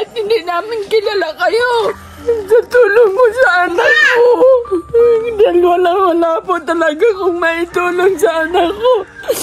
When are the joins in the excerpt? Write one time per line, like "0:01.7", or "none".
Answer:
0:02.1